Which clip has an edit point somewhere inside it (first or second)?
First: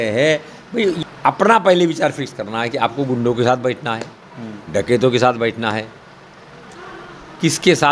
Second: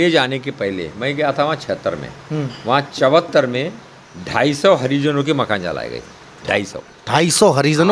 first